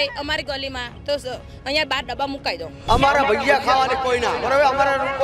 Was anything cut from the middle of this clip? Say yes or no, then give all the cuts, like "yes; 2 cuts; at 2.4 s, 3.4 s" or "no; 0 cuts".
yes; 1 cut; at 2.8 s